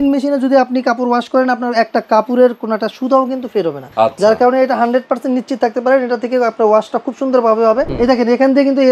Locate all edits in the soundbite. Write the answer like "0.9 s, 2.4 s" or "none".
3.8 s, 7.9 s